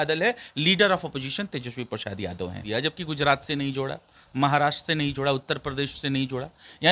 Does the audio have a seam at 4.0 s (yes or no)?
no